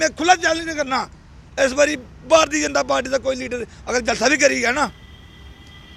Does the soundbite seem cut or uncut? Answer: uncut